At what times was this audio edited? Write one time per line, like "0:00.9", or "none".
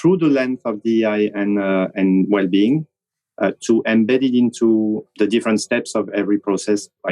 0:05.1